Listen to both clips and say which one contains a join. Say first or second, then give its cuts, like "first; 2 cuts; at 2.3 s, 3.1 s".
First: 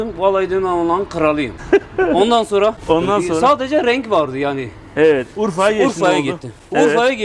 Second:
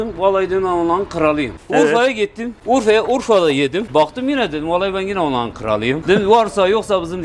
second; 4 cuts; at 1.5 s, 2.5 s, 3.9 s, 6.0 s